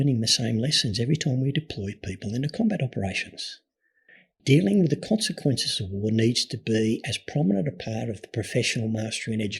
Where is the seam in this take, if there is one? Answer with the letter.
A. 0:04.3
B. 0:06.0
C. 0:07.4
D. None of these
A